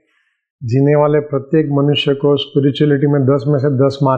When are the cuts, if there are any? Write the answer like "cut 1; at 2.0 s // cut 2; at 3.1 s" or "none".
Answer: none

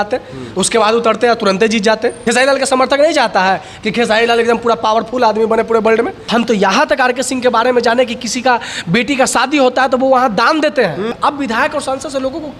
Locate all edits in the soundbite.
cut 1; at 2.2 s // cut 2; at 6.2 s // cut 3; at 11.2 s

